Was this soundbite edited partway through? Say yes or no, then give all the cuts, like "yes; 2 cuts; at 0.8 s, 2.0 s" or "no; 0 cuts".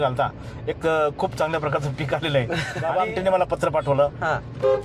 yes; 1 cut; at 2.7 s